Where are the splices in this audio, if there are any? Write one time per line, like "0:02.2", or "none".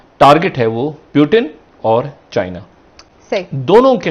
none

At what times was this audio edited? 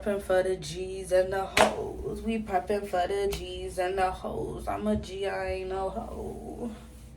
none

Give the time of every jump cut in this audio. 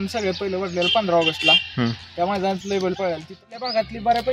0:03.4

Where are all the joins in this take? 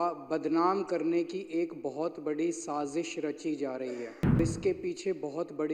0:04.4

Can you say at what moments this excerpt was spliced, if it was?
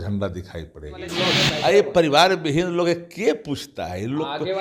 0:01.2

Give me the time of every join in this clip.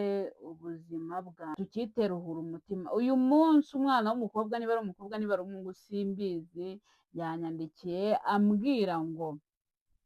0:01.5

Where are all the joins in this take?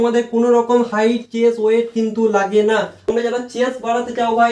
0:03.1

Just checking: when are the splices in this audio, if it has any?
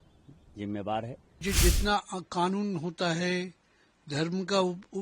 0:01.4

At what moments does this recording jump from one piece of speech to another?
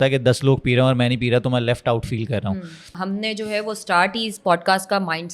0:02.9

